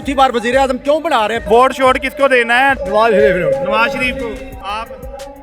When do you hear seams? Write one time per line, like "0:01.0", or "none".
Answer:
0:01.4
0:02.8
0:04.6

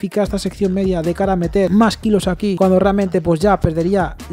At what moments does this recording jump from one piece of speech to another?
none

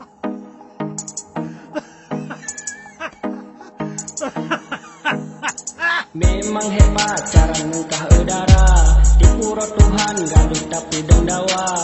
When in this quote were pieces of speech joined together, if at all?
none

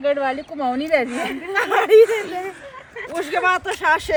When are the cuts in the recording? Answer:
none

